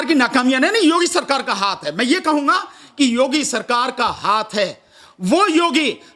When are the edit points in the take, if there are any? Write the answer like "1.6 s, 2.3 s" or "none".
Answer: none